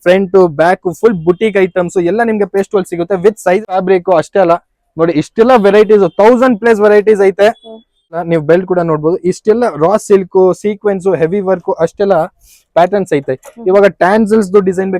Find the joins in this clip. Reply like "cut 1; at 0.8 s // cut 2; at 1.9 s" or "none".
cut 1; at 3.6 s // cut 2; at 8.2 s